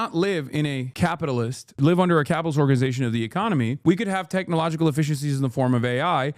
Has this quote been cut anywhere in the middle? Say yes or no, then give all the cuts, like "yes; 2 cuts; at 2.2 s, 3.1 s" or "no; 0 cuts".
yes; 1 cut; at 1.8 s